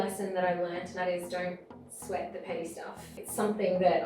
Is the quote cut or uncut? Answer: cut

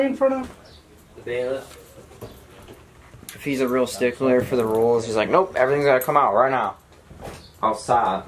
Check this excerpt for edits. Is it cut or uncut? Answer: uncut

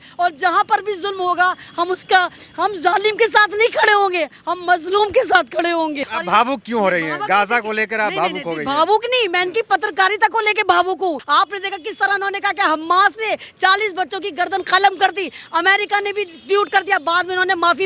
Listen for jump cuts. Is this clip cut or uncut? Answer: cut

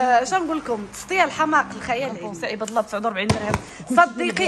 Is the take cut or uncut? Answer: cut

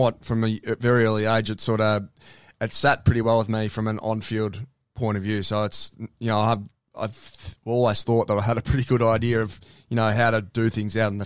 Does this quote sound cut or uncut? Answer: uncut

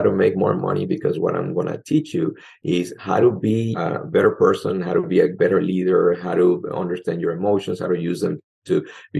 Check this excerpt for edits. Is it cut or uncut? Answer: cut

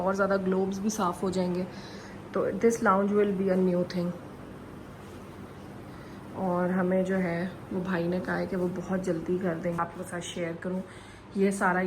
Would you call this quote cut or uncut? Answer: cut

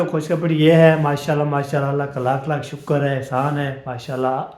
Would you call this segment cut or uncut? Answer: uncut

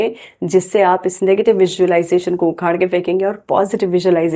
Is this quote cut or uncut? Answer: uncut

